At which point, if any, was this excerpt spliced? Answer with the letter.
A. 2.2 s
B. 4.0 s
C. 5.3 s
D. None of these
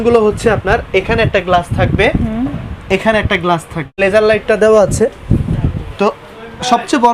B